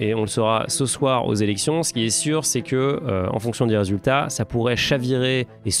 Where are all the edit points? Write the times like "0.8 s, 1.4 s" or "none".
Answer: none